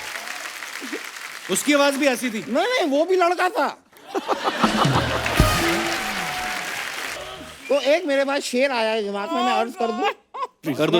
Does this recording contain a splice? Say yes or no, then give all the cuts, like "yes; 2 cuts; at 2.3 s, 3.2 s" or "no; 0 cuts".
yes; 1 cut; at 7.2 s